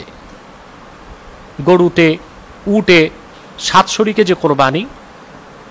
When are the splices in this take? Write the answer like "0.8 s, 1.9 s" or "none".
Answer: none